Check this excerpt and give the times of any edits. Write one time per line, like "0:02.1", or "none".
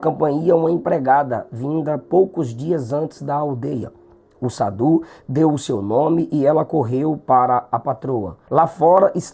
0:08.4